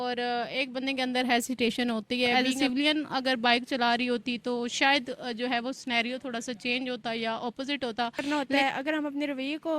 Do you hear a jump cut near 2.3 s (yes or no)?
yes